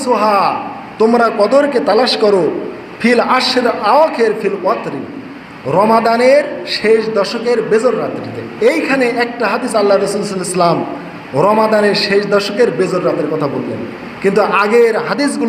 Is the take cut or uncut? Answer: cut